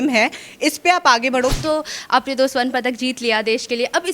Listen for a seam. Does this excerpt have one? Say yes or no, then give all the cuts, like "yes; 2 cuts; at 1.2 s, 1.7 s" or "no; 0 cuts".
yes; 1 cut; at 1.6 s